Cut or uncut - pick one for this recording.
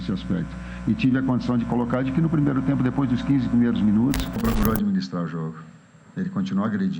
cut